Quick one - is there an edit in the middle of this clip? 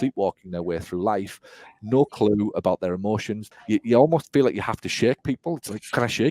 yes; 1 cut; at 3.4 s

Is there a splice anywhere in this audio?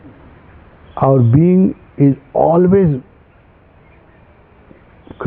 no; 0 cuts

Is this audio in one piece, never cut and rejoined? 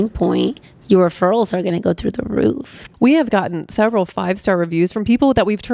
no; 1 cut; at 2.8 s

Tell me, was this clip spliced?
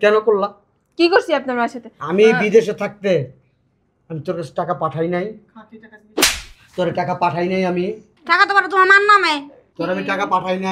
yes; 2 cuts; at 8.1 s, 9.6 s

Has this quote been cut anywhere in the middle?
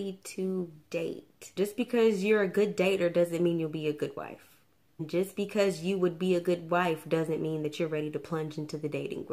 yes; 2 cuts; at 1.5 s, 5.1 s

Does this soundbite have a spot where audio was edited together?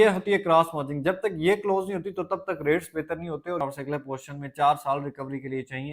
yes; 1 cut; at 3.6 s

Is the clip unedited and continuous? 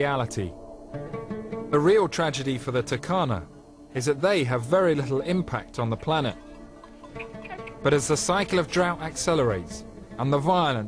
no; 1 cut; at 1.5 s

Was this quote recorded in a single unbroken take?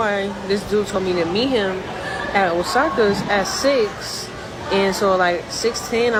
yes; 0 cuts

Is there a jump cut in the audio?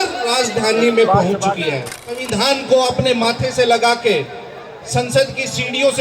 yes; 1 cut; at 2.2 s

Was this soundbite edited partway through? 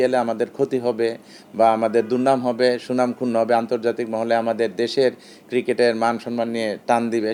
no; 0 cuts

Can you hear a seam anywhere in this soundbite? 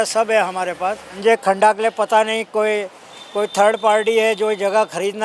yes; 1 cut; at 1.1 s

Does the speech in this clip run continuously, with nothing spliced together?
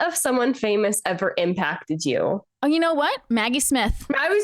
no; 1 cut; at 2.6 s

